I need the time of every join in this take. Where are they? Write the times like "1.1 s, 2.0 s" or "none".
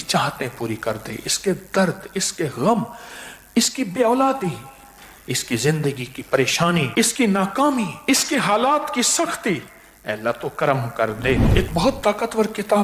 6.9 s, 8.0 s, 11.5 s